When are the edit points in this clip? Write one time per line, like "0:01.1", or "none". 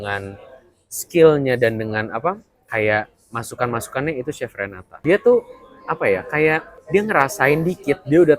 0:05.0
0:06.7